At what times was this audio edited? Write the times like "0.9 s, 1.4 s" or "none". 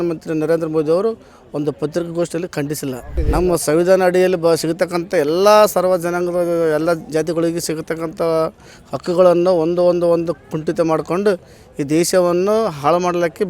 3.1 s

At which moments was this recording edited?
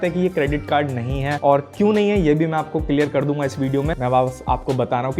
1.3 s, 3.9 s

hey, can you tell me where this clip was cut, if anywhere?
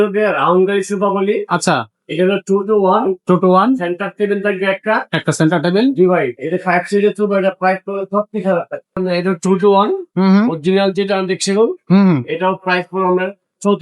9.0 s

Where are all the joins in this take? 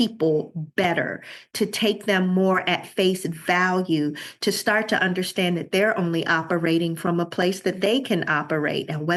none

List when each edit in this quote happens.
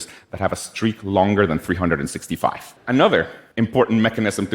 2.7 s, 3.4 s

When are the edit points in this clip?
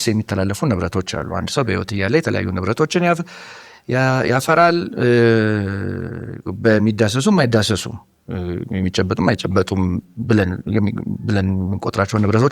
none

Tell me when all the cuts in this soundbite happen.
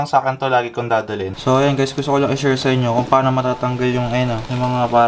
1.3 s

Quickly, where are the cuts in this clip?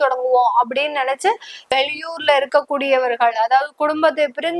1.7 s

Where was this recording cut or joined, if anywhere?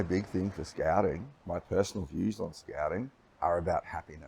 1.3 s, 3.2 s

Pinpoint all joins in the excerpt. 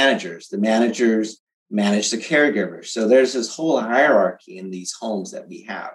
none

